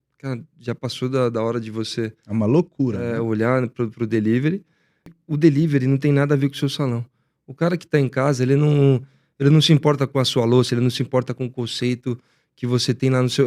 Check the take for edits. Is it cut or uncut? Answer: cut